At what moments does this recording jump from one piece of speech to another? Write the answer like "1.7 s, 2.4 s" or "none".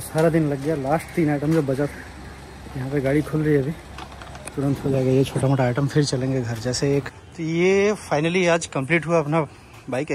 7.2 s